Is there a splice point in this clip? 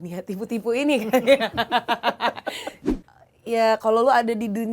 yes; 1 cut; at 2.8 s

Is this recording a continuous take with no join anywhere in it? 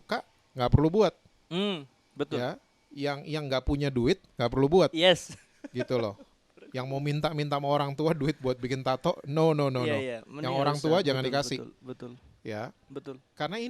yes; 0 cuts

